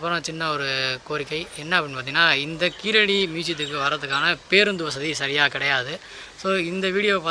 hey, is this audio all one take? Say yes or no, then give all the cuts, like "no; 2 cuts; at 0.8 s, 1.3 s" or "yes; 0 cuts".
yes; 0 cuts